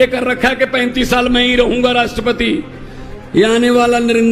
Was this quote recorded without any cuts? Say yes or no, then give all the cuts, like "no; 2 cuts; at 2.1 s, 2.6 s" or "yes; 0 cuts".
yes; 0 cuts